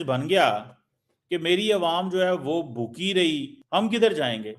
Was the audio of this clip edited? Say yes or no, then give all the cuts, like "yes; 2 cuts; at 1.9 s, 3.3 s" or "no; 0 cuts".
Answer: yes; 1 cut; at 3.5 s